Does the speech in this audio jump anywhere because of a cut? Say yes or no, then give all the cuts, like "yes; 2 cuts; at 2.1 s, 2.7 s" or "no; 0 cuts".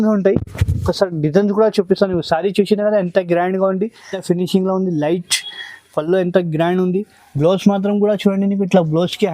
yes; 1 cut; at 4.2 s